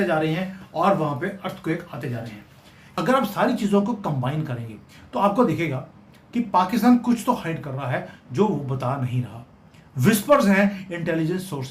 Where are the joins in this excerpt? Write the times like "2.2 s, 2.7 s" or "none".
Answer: 2.8 s